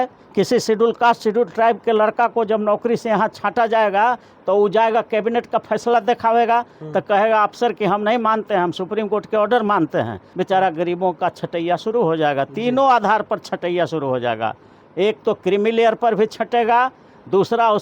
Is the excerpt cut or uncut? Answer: cut